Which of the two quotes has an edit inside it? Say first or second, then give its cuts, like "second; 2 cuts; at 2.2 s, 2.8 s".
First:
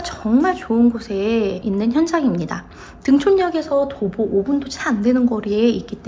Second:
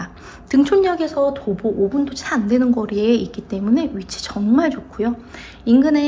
first; 1 cut; at 1.6 s